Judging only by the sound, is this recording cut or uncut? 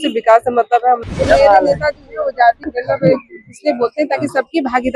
cut